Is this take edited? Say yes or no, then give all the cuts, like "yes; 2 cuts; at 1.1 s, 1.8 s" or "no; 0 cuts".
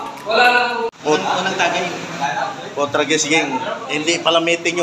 yes; 1 cut; at 1.0 s